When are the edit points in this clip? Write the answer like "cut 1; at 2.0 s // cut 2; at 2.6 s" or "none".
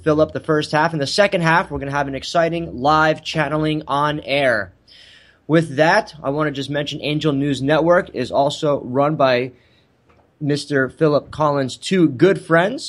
none

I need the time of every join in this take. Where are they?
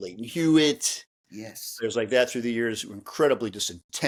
none

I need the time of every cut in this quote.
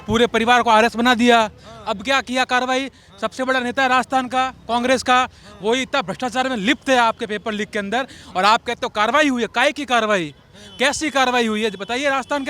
none

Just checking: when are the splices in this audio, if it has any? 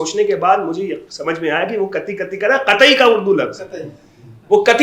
none

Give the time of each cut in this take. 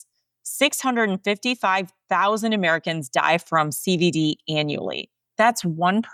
none

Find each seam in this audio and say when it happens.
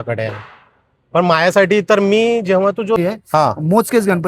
cut 1; at 3.0 s

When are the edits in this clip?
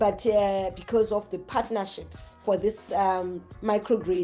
cut 1; at 2.4 s

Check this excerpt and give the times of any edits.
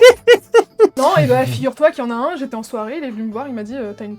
cut 1; at 0.9 s

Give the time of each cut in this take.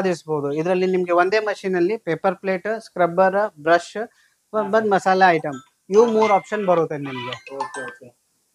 none

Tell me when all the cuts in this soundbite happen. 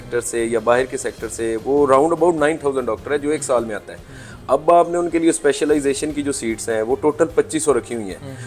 none

